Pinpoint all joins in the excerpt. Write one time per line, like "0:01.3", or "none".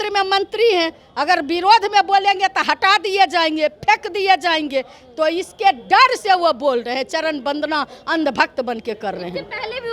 none